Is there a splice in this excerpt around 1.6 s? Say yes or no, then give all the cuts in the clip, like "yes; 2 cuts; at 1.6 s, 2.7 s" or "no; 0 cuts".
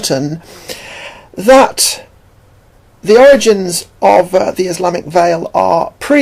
yes; 1 cut; at 1.6 s